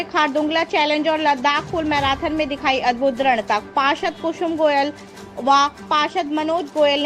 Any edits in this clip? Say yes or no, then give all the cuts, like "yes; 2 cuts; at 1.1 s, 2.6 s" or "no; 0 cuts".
no; 0 cuts